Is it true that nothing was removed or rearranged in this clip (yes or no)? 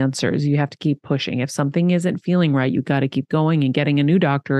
yes